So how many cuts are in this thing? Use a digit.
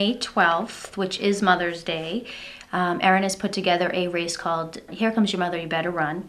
1